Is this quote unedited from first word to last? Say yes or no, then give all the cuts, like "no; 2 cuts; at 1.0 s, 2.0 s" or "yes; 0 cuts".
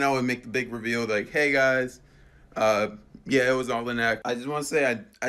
no; 1 cut; at 4.2 s